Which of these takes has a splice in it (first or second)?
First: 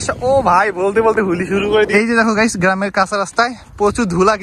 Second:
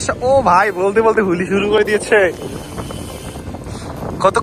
first